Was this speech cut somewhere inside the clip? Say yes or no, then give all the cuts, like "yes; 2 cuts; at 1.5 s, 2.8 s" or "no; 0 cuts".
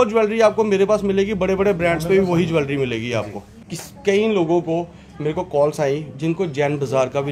no; 0 cuts